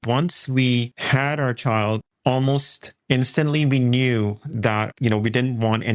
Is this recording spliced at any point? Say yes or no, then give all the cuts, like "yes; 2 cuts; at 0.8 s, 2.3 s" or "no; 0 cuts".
yes; 2 cuts; at 1.0 s, 4.9 s